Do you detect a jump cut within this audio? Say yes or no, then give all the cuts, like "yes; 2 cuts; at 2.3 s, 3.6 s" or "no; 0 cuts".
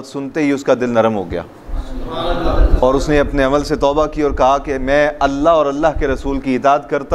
no; 0 cuts